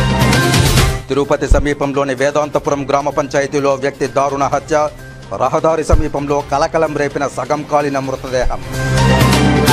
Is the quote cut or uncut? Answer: cut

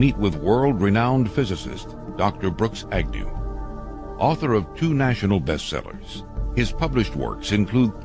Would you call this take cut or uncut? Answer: cut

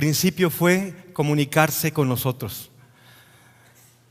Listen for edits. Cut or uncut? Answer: uncut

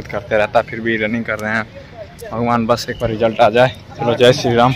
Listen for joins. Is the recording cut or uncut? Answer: cut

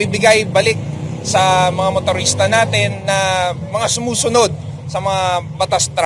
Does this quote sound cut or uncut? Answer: uncut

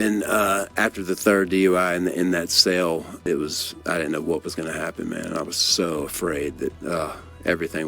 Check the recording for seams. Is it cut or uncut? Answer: cut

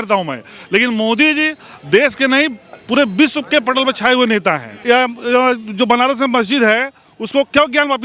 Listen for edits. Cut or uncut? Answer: cut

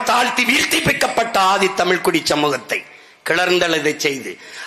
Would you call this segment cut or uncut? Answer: uncut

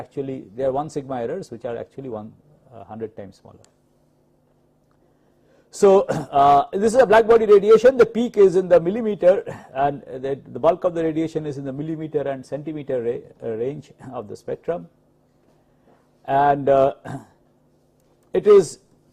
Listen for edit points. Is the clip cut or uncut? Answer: cut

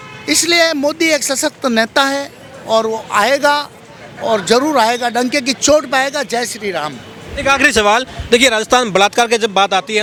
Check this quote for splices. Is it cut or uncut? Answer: uncut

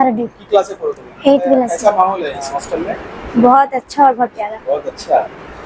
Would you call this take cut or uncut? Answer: cut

